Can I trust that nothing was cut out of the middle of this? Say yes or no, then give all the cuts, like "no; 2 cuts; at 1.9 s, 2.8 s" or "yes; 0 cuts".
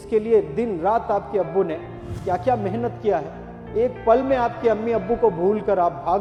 yes; 0 cuts